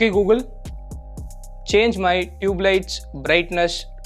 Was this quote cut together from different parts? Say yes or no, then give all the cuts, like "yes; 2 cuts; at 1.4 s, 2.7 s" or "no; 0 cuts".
no; 0 cuts